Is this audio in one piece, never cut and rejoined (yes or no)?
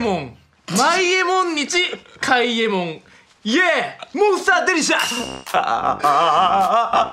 yes